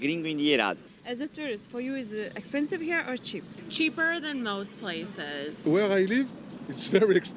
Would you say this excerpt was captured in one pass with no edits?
no; 3 cuts; at 0.9 s, 3.6 s, 5.5 s

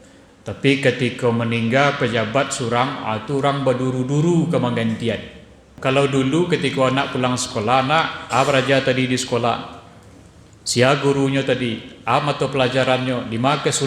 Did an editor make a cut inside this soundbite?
yes; 1 cut; at 5.7 s

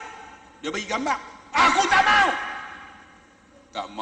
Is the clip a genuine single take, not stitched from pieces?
yes; 0 cuts

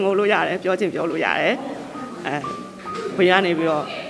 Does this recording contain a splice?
no; 0 cuts

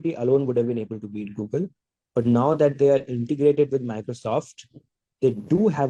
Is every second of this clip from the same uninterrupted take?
yes; 0 cuts

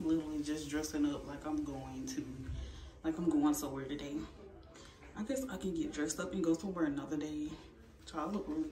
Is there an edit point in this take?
no; 0 cuts

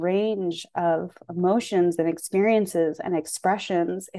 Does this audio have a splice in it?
no; 0 cuts

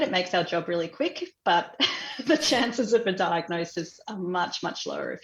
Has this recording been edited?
no; 0 cuts

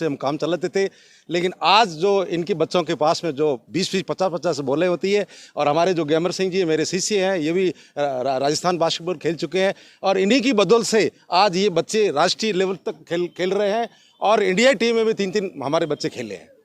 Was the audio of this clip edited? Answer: no; 0 cuts

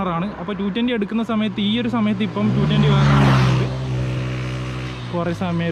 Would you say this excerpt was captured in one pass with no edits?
yes; 0 cuts

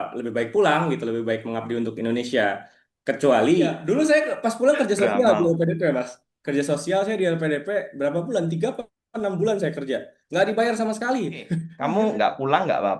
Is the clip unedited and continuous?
no; 2 cuts; at 3.8 s, 11.6 s

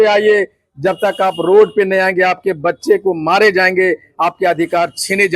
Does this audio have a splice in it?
no; 0 cuts

